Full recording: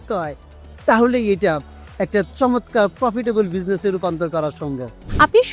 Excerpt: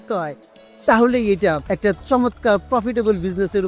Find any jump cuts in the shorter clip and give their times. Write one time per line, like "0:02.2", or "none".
0:01.7